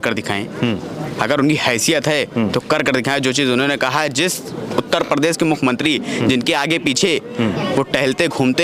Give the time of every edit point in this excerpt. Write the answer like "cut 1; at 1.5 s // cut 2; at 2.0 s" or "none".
none